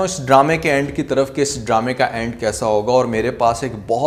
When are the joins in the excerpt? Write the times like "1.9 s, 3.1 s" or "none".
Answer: none